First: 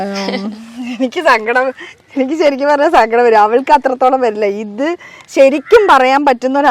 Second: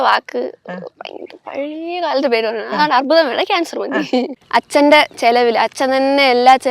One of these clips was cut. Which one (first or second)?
second